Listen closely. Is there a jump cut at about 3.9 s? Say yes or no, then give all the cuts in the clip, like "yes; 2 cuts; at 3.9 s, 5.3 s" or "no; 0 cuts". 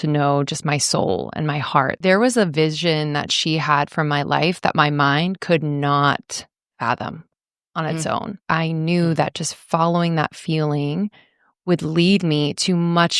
no; 2 cuts; at 1.9 s, 8.5 s